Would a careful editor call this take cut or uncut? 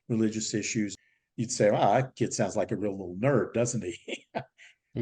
cut